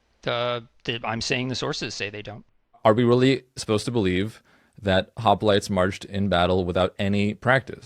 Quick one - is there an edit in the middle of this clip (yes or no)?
yes